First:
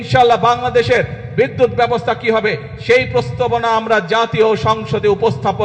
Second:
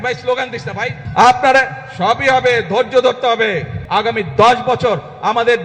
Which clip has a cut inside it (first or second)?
second